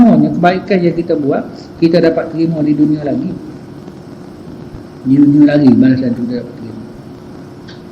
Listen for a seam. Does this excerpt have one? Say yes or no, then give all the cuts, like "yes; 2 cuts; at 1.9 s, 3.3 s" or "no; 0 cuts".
no; 0 cuts